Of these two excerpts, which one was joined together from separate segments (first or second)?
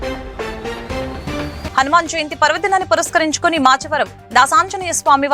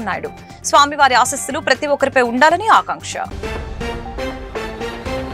first